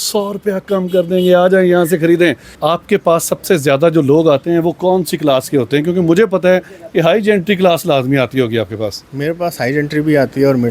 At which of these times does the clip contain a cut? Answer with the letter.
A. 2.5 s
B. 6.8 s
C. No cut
A